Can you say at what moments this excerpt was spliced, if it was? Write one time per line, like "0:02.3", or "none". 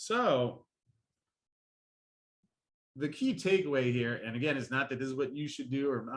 none